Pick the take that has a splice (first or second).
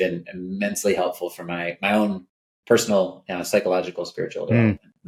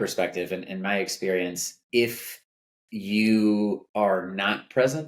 second